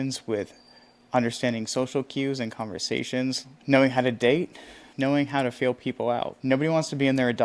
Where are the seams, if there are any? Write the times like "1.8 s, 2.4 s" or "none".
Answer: 3.5 s, 4.9 s, 6.4 s